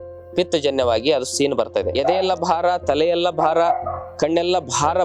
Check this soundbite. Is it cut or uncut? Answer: cut